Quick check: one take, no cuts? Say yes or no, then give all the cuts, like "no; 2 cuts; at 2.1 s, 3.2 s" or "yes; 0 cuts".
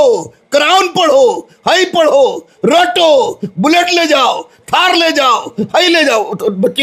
yes; 0 cuts